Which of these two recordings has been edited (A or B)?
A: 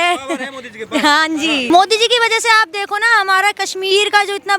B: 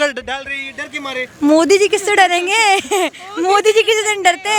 A